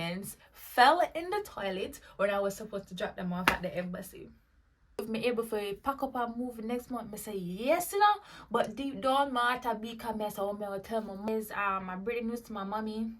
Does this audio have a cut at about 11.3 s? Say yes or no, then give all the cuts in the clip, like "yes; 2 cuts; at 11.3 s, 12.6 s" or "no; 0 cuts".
yes; 2 cuts; at 5.0 s, 11.3 s